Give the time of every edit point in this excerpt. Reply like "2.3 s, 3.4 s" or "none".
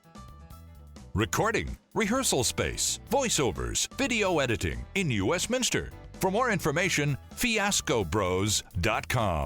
1.1 s